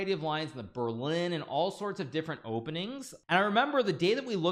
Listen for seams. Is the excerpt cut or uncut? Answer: cut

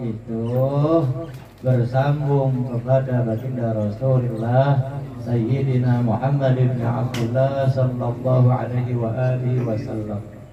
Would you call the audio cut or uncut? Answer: uncut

